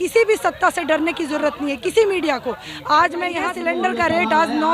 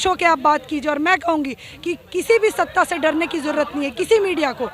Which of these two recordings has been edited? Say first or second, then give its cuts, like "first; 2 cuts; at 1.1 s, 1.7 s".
first; 1 cut; at 3.5 s